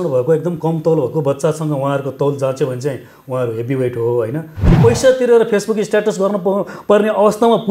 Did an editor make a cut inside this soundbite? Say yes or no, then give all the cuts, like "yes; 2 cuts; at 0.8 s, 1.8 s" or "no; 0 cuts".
yes; 1 cut; at 4.8 s